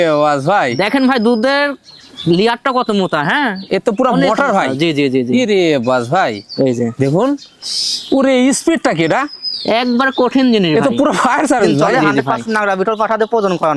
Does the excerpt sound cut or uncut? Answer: cut